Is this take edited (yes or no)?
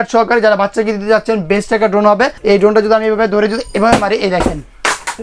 yes